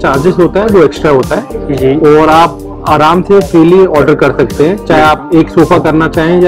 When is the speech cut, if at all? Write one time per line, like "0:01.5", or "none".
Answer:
none